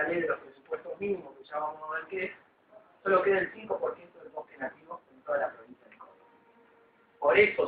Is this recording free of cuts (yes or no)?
yes